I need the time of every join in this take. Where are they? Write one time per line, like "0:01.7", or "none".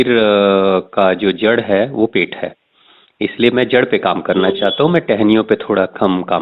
none